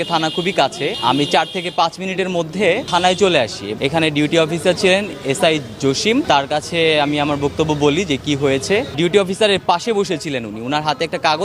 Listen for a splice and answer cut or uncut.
cut